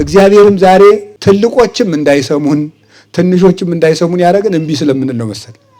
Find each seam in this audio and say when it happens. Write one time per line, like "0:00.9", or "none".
0:01.1